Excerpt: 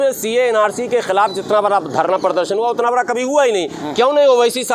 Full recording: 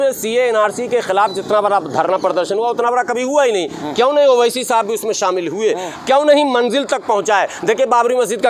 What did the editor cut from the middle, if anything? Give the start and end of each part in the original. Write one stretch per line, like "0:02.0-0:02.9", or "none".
none